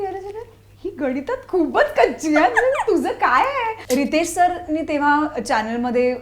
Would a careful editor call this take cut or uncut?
cut